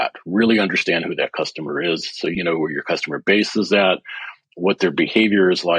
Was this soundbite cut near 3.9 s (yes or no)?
no